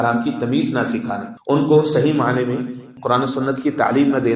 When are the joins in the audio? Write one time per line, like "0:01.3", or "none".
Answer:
0:01.3
0:02.9